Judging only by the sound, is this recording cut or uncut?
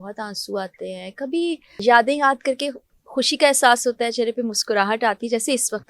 cut